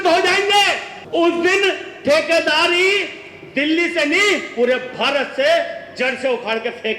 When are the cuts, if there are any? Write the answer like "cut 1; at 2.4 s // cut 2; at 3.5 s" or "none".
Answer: cut 1; at 0.9 s